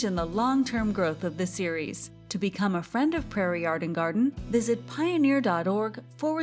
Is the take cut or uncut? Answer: uncut